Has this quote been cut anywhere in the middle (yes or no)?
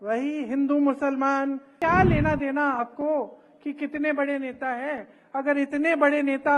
yes